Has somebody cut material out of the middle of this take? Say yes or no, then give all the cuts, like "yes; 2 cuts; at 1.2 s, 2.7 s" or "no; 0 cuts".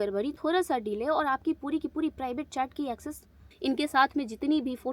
yes; 1 cut; at 3.4 s